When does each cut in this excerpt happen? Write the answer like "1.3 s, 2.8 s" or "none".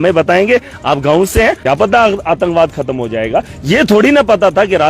1.6 s